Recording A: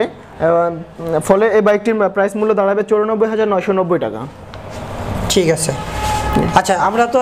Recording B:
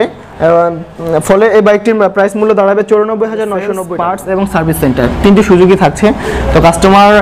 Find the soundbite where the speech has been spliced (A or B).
B